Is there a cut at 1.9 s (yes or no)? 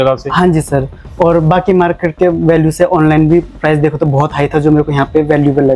no